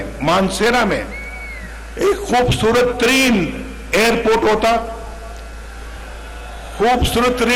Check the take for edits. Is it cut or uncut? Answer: uncut